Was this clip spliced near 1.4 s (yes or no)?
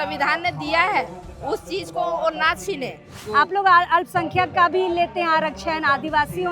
no